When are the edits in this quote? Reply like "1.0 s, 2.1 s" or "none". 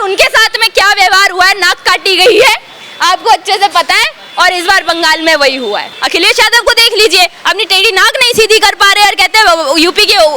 5.9 s